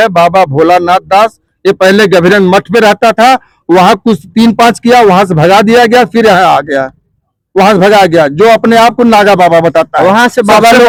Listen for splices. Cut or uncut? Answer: uncut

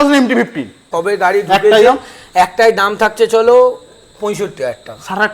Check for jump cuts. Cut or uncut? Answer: cut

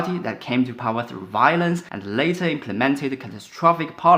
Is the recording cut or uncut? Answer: uncut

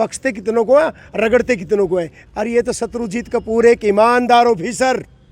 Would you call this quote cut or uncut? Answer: cut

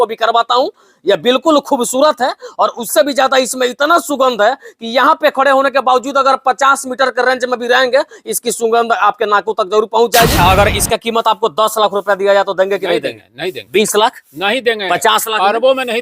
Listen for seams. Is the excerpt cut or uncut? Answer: cut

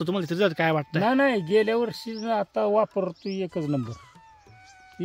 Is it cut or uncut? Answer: uncut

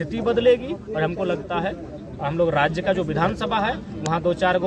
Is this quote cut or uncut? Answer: uncut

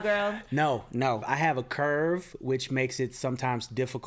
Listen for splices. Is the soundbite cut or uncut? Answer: cut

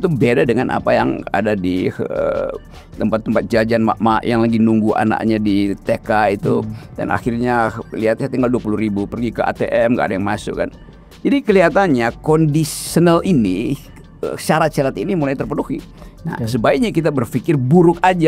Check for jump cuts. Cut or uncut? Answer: uncut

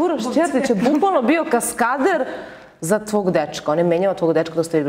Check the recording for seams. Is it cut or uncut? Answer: uncut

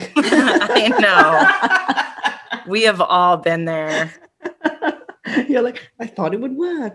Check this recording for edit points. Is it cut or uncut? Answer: uncut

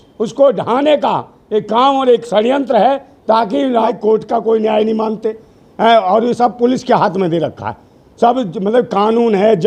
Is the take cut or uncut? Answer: cut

